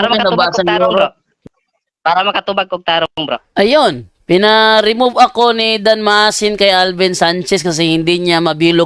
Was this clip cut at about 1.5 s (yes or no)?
no